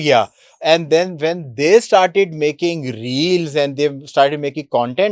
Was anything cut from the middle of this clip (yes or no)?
no